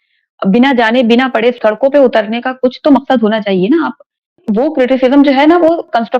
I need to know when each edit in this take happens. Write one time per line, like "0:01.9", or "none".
0:04.4